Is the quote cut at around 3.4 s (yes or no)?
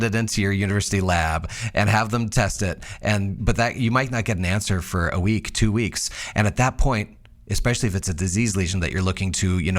yes